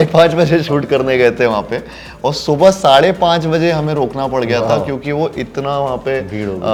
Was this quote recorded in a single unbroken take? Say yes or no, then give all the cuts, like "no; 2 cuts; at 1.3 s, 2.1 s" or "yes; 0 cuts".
yes; 0 cuts